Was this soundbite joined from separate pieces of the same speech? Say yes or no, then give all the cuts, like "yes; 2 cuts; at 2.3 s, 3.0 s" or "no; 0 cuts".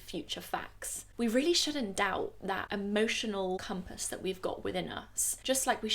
yes; 2 cuts; at 2.7 s, 3.6 s